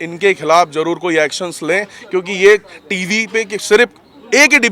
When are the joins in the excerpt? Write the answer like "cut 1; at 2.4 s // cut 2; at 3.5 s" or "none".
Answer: none